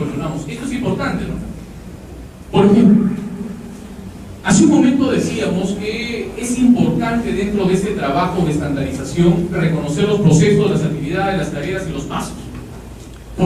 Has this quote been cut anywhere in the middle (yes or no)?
no